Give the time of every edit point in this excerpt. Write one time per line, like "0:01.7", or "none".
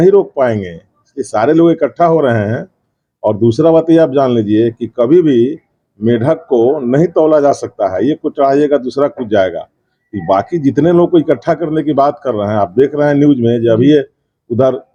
none